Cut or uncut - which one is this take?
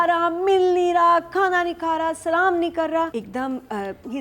cut